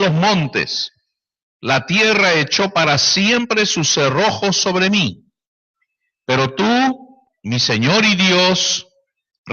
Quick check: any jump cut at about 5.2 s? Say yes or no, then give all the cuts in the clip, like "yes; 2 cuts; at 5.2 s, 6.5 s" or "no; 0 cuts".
no; 0 cuts